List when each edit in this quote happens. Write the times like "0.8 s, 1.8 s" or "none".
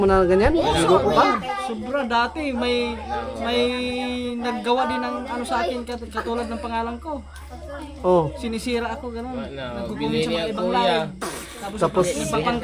none